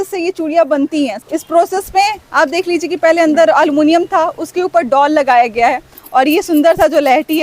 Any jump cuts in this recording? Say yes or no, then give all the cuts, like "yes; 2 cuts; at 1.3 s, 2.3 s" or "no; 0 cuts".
yes; 2 cuts; at 1.2 s, 5.9 s